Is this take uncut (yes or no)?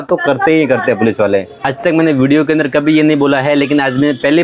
no